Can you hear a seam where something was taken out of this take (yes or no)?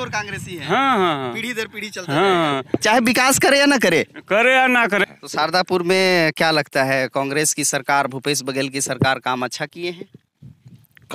yes